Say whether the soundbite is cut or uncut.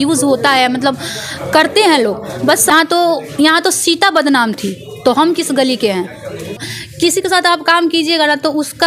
cut